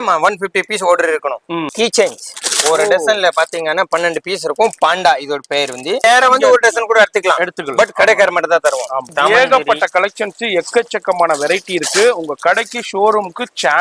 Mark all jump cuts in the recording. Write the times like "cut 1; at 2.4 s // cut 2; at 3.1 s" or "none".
cut 1; at 1.7 s // cut 2; at 6.0 s // cut 3; at 9.1 s